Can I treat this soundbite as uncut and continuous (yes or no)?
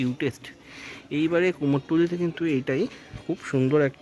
yes